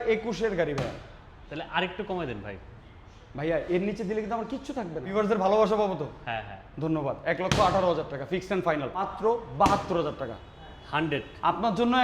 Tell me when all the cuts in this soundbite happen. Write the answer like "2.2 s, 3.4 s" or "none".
5.1 s, 9.1 s